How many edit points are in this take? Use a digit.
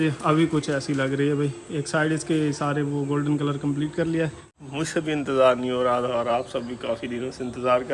1